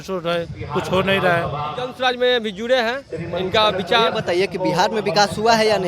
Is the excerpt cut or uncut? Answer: cut